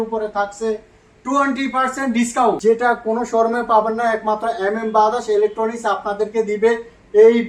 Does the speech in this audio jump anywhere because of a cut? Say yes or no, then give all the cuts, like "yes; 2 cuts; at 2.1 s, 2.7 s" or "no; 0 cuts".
yes; 1 cut; at 2.6 s